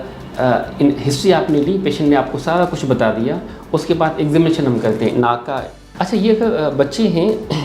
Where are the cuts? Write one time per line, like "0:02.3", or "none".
0:05.9